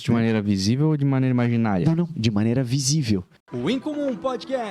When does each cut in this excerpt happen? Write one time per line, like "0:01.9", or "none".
0:03.4